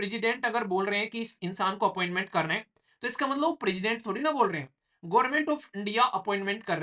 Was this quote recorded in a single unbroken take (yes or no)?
yes